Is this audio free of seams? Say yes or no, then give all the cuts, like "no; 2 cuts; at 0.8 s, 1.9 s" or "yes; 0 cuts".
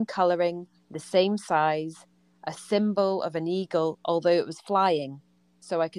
yes; 0 cuts